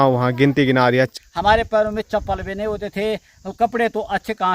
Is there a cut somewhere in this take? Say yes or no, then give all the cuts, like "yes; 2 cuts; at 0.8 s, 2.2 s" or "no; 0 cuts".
yes; 1 cut; at 1.1 s